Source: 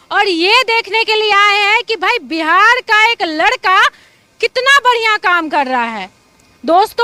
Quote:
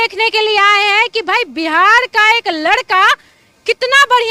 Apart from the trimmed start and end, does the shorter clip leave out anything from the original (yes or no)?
no